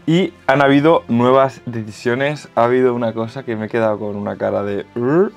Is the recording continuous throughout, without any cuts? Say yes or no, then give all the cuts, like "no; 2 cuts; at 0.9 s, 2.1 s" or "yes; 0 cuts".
yes; 0 cuts